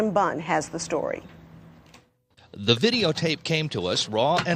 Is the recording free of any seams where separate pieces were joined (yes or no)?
yes